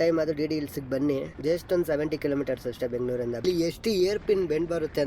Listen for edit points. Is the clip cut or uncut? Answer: cut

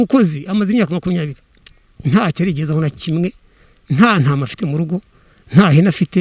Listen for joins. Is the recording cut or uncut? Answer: uncut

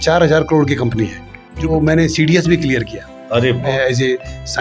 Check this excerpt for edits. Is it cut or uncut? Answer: cut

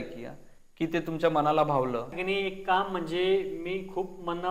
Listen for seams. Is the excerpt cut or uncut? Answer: cut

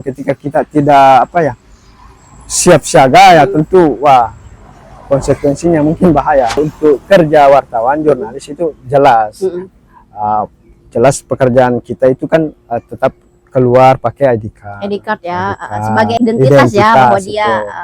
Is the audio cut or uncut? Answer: cut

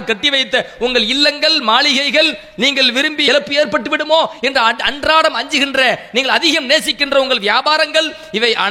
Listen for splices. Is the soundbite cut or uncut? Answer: cut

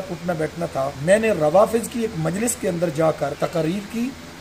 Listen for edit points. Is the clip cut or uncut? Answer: cut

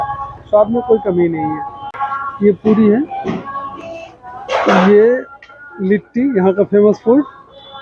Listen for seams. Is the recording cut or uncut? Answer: cut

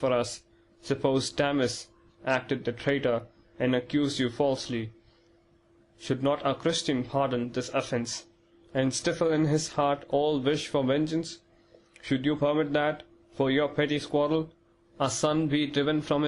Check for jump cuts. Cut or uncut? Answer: cut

